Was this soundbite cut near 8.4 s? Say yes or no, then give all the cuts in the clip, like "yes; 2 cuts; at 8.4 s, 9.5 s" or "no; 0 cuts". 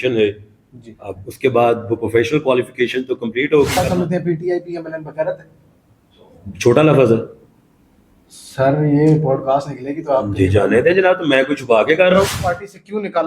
no; 2 cuts; at 3.8 s, 12.4 s